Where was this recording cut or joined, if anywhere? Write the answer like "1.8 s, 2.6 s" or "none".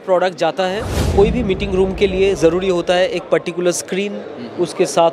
0.9 s